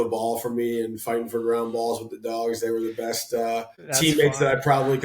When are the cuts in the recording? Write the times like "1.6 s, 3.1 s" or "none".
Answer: 4.0 s